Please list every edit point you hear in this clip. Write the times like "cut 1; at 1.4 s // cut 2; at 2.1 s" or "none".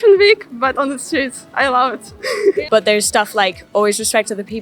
cut 1; at 2.7 s